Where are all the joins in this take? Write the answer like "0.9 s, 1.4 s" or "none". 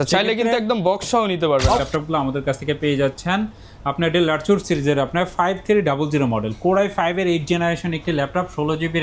1.8 s